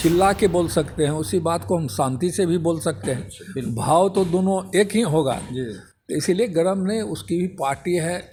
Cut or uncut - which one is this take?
uncut